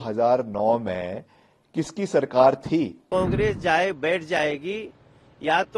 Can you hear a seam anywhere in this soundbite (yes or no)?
yes